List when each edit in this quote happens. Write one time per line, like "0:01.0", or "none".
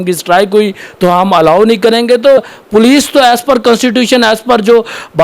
0:02.4